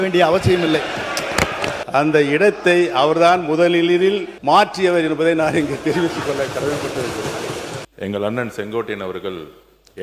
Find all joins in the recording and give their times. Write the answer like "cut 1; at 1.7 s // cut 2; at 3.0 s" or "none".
cut 1; at 1.8 s // cut 2; at 4.3 s // cut 3; at 7.8 s